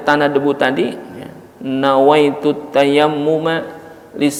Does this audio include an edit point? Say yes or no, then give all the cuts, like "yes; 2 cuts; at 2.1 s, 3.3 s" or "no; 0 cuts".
no; 0 cuts